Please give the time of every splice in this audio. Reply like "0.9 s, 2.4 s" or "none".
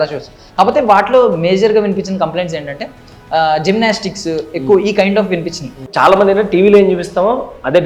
5.8 s